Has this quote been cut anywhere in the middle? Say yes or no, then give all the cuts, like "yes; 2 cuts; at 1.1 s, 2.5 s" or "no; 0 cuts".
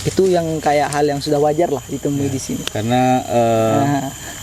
no; 0 cuts